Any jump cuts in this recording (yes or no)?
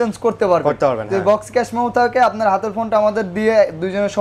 no